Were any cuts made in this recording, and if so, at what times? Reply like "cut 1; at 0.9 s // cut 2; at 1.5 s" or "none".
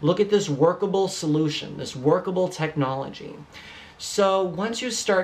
none